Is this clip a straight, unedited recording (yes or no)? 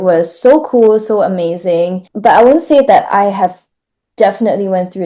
no